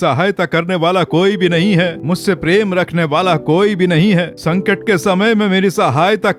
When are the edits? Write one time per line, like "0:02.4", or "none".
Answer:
none